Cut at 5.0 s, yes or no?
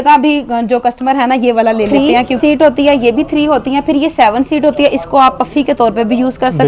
no